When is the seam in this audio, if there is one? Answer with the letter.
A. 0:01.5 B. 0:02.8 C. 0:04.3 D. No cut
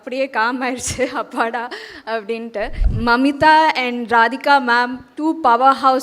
B